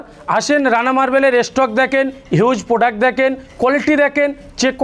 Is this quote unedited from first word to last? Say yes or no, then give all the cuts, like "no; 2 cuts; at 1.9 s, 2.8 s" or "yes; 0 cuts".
yes; 0 cuts